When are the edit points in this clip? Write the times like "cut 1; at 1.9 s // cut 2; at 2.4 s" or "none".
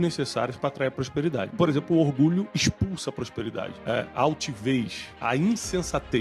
cut 1; at 2.5 s // cut 2; at 3.8 s // cut 3; at 5.0 s